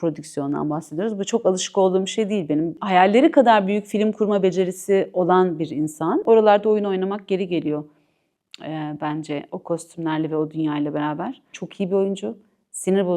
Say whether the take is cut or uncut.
cut